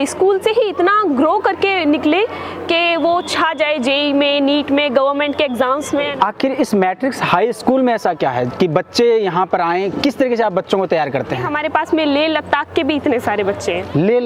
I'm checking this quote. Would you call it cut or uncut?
cut